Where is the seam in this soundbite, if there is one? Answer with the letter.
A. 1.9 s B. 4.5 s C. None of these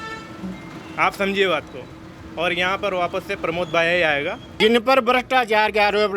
B